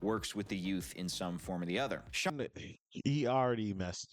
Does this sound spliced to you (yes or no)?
yes